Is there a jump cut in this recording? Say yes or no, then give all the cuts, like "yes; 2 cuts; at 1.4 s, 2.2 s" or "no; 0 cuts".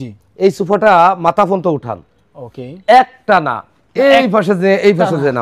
no; 0 cuts